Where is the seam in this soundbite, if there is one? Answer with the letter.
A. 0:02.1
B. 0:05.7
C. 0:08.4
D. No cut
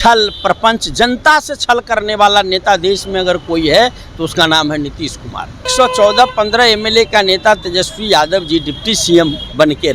B